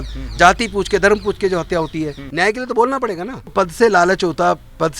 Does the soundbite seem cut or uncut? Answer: cut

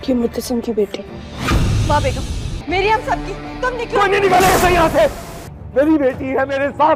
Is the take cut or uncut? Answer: uncut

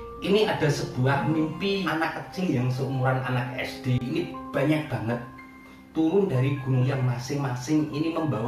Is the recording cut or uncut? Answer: cut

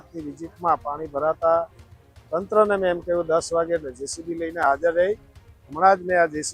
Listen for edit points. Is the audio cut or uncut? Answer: uncut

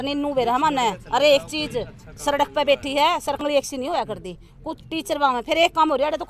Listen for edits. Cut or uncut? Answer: cut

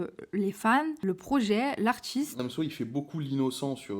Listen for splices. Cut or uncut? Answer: cut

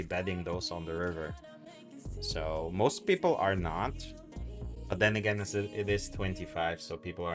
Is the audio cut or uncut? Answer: uncut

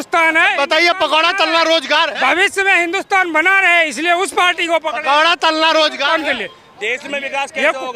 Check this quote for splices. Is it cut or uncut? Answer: uncut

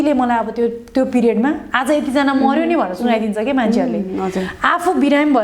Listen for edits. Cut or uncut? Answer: uncut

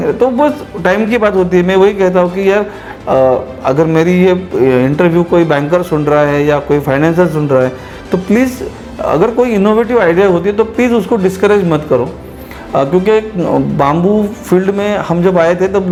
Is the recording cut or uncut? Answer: uncut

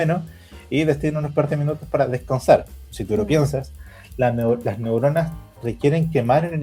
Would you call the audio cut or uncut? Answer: uncut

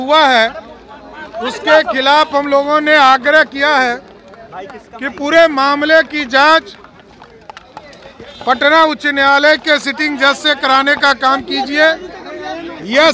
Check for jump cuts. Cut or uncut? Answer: uncut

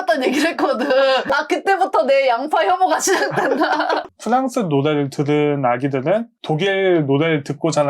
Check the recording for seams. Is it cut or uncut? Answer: cut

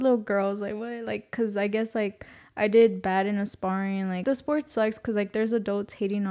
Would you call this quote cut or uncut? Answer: cut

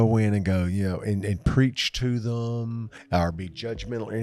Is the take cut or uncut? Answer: cut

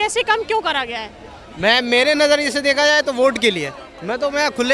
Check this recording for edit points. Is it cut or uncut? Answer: uncut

